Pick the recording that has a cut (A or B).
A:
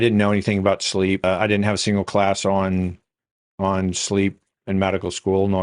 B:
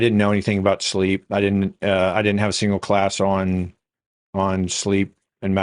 A